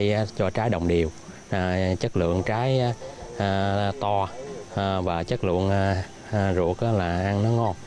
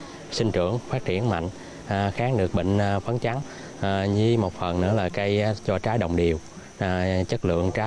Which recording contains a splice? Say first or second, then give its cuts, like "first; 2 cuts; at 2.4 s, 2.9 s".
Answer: second; 1 cut; at 3.5 s